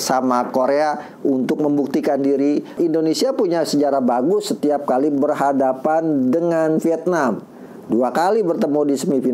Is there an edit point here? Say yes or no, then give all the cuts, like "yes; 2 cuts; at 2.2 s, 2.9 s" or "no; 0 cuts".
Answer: yes; 1 cut; at 2.8 s